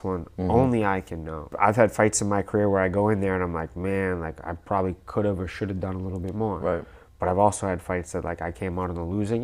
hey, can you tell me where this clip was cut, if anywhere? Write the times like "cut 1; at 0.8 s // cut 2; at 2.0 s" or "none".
none